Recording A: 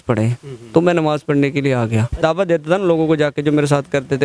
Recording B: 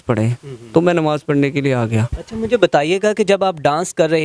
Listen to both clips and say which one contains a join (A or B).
A